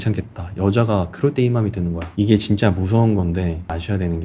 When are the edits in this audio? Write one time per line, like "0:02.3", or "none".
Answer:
0:02.0